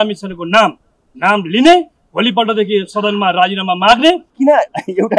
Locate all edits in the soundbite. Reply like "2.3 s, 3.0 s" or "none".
4.3 s